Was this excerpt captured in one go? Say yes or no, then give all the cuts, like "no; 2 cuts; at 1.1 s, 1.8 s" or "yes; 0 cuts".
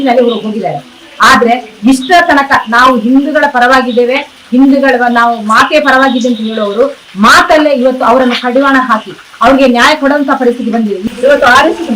no; 1 cut; at 11.0 s